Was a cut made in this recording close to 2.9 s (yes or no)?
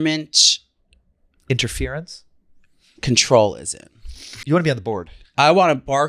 no